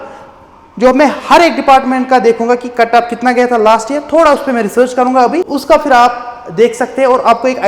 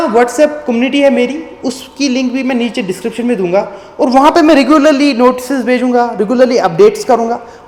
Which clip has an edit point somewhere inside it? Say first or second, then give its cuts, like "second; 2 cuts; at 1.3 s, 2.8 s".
first; 1 cut; at 5.5 s